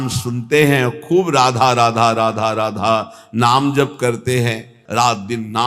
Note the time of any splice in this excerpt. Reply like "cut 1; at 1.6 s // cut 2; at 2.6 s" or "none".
cut 1; at 4.8 s